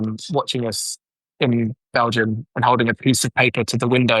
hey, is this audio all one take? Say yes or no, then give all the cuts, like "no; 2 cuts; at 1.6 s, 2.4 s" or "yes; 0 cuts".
no; 1 cut; at 2.3 s